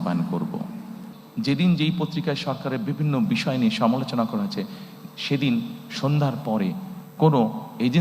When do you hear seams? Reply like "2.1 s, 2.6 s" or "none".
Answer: 1.0 s